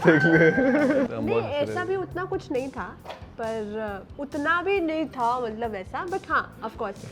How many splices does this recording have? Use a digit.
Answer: 1